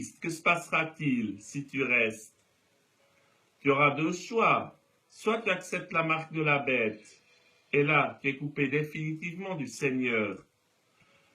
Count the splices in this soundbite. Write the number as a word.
zero